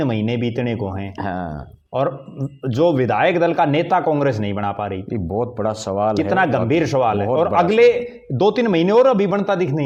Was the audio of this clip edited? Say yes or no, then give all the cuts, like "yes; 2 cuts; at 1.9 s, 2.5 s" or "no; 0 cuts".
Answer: no; 0 cuts